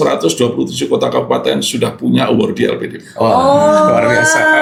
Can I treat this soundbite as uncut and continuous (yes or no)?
yes